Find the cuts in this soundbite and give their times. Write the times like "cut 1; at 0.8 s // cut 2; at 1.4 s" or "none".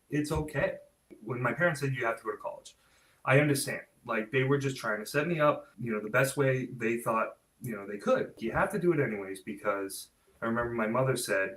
cut 1; at 1.1 s // cut 2; at 5.7 s // cut 3; at 7.5 s // cut 4; at 8.4 s